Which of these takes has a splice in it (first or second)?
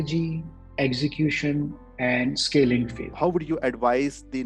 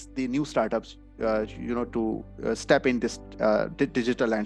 first